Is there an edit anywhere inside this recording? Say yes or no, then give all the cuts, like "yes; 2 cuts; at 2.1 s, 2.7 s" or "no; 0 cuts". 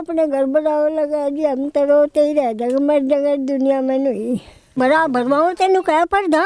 yes; 1 cut; at 4.7 s